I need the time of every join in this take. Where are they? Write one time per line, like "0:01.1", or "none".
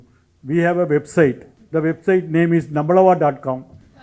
0:01.5